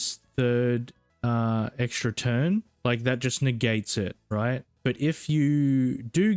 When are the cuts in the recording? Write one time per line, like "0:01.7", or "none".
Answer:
0:01.0
0:02.7
0:04.7